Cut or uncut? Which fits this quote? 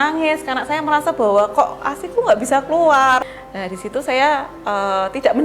cut